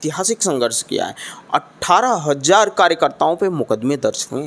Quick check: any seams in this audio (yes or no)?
no